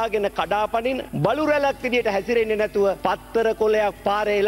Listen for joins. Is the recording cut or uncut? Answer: uncut